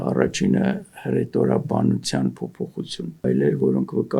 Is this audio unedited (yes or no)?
no